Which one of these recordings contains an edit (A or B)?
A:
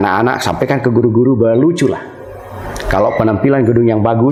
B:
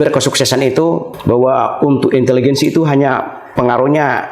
B